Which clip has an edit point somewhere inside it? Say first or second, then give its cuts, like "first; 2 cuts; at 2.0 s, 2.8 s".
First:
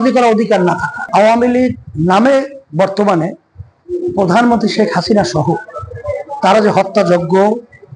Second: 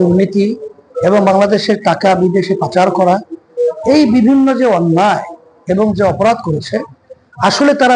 first; 1 cut; at 0.9 s